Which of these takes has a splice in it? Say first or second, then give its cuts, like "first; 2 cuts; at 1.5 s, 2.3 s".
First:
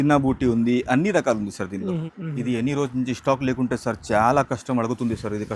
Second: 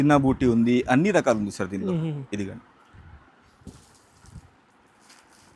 first; 1 cut; at 2.1 s